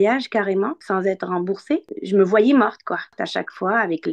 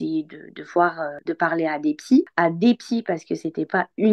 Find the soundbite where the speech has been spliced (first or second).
first